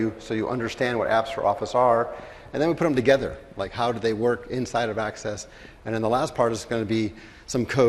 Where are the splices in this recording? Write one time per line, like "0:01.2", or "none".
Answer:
0:05.2